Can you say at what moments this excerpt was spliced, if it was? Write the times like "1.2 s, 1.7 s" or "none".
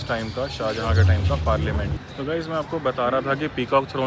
2.0 s